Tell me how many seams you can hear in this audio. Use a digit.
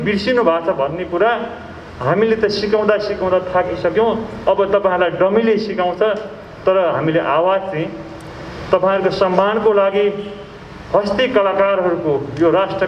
0